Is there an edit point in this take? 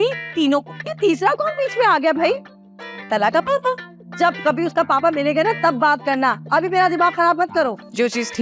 no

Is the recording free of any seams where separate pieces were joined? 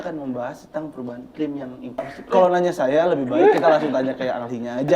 no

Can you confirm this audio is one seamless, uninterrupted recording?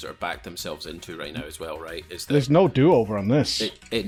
yes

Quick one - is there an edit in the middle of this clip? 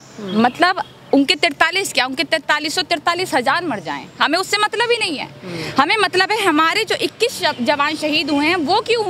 no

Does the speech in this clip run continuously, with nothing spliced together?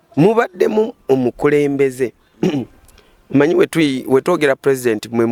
yes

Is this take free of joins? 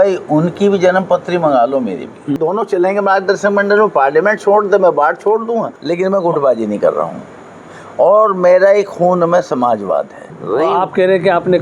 no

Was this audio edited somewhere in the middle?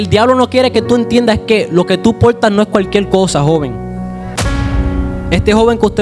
yes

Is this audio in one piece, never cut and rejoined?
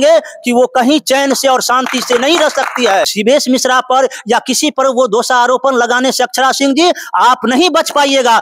no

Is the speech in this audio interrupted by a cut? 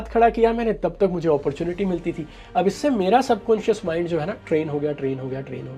no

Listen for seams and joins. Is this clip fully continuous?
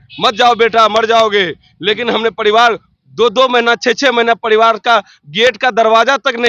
yes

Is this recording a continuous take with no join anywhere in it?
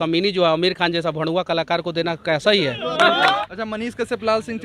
no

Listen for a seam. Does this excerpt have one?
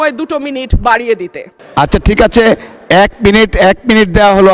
yes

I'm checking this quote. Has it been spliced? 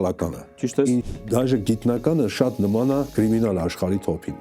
yes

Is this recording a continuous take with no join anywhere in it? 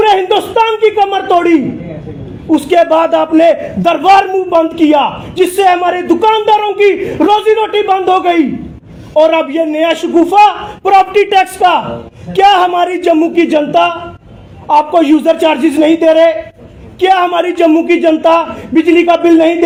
yes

